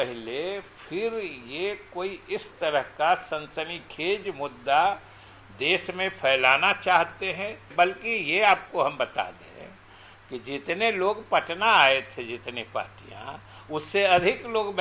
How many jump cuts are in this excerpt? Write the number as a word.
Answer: one